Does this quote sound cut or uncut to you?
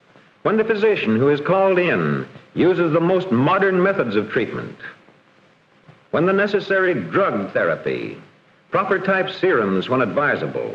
uncut